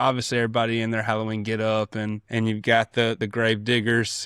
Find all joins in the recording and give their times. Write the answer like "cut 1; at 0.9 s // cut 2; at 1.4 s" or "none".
cut 1; at 2.2 s // cut 2; at 3.2 s